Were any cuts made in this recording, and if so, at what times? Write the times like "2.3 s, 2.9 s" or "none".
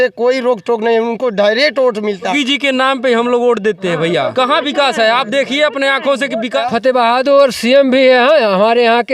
2.3 s, 4.3 s, 6.6 s